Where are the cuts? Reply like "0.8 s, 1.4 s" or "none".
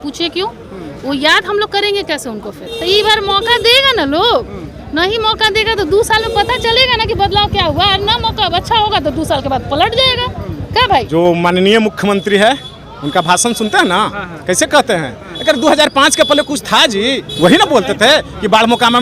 2.7 s, 11.1 s, 17.3 s